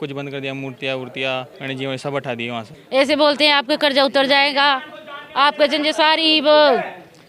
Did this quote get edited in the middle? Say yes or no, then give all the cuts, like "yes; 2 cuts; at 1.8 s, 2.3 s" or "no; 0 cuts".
yes; 2 cuts; at 1.5 s, 2.8 s